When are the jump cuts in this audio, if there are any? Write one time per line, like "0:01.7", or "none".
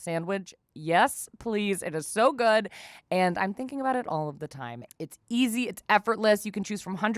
0:04.8